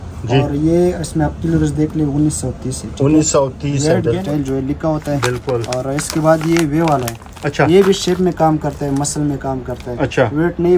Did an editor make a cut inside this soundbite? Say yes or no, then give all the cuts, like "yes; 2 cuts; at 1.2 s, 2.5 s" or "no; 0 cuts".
yes; 1 cut; at 4.2 s